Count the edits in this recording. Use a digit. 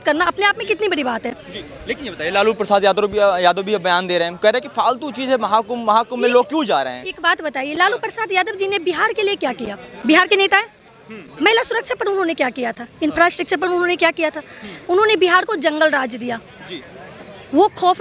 0